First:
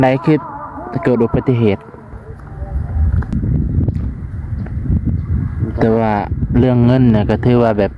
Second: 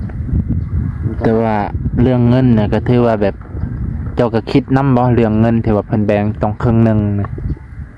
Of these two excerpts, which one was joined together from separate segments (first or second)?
first